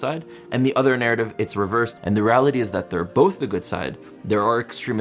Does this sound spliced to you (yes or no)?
yes